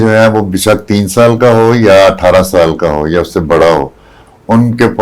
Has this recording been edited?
no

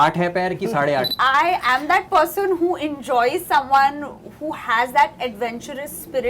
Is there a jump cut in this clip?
yes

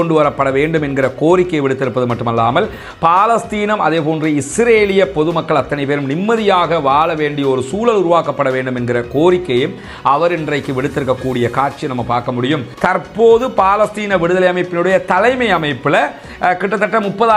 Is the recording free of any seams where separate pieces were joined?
no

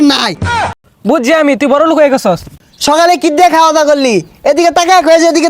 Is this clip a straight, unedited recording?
no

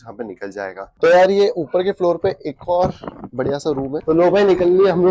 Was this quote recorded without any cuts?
no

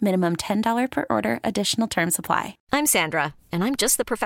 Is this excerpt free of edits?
no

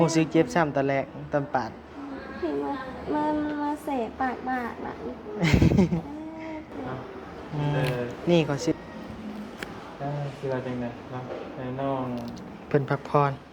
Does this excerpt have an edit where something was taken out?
yes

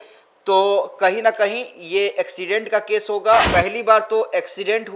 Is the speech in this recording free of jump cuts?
no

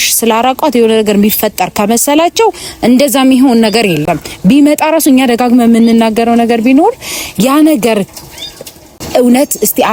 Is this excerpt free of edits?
yes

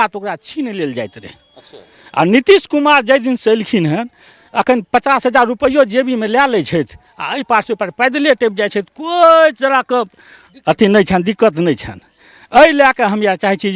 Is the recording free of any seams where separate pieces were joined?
yes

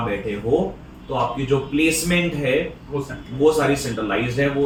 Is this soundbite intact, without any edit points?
yes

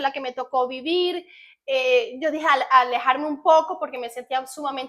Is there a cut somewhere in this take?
no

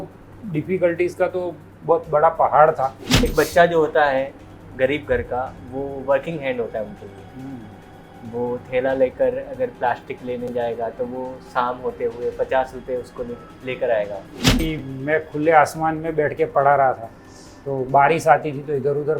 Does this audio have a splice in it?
yes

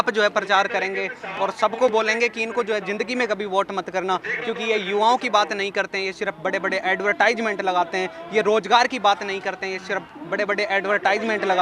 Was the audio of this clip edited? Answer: no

